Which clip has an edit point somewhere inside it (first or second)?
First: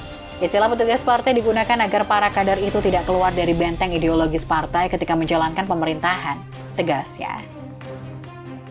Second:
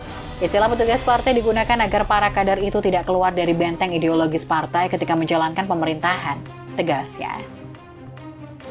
second